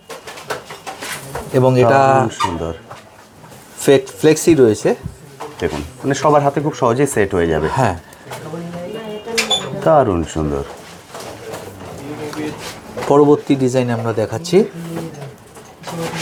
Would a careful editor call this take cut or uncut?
uncut